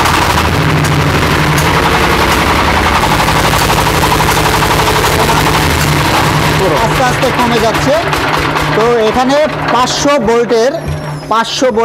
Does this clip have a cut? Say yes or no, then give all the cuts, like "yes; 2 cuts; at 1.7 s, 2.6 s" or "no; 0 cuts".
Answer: no; 0 cuts